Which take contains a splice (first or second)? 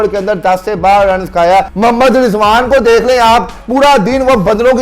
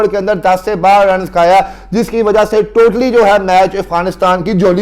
first